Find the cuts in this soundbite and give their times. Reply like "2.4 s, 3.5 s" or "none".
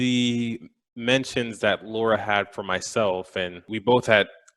3.7 s